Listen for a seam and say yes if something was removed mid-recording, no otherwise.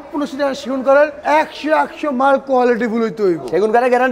no